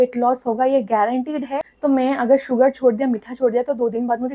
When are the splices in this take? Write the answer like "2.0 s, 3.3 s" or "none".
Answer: 1.6 s